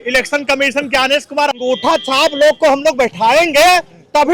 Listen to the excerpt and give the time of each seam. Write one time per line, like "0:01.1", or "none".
0:01.6